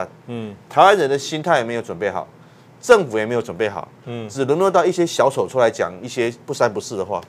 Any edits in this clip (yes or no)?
no